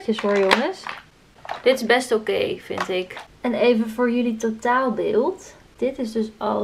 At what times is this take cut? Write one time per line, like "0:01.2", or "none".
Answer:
none